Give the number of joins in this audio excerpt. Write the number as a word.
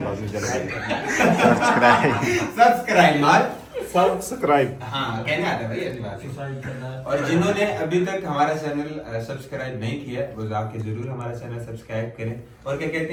zero